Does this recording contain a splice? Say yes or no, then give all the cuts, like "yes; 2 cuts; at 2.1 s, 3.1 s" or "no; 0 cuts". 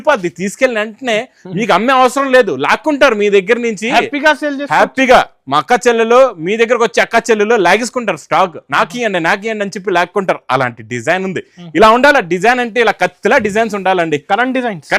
no; 0 cuts